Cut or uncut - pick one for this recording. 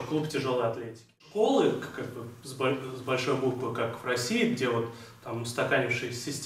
cut